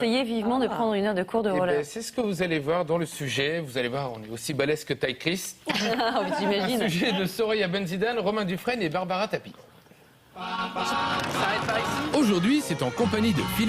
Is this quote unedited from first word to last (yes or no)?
no